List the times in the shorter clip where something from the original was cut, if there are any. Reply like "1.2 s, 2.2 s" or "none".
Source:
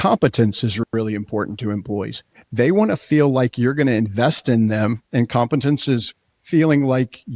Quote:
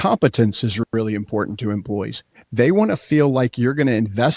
none